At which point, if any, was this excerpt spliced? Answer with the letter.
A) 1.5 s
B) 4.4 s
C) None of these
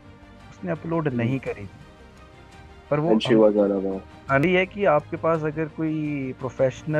B